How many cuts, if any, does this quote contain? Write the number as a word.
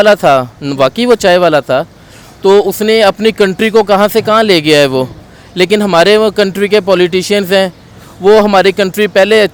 zero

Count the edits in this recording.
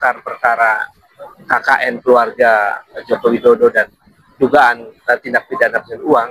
zero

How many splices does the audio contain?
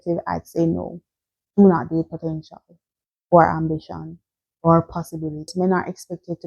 one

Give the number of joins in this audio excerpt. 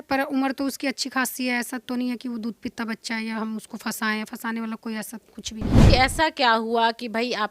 one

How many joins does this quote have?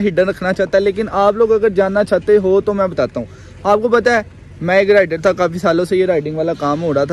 zero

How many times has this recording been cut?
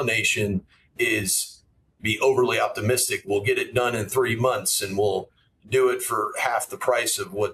zero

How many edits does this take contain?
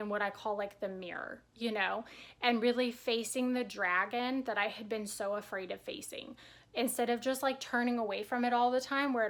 zero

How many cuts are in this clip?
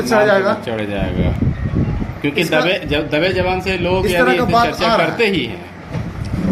zero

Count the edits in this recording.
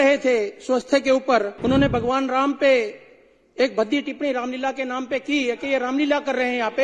one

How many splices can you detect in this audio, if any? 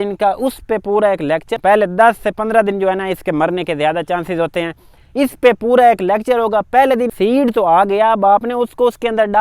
two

